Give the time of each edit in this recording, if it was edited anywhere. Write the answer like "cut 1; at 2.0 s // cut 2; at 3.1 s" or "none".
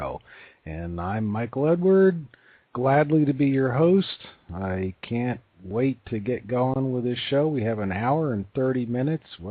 cut 1; at 8.6 s